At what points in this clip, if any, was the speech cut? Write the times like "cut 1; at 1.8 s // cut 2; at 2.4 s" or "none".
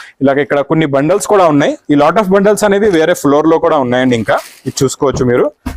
none